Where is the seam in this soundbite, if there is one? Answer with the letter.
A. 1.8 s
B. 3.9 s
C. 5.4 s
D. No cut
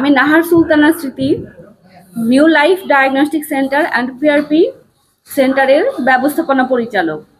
D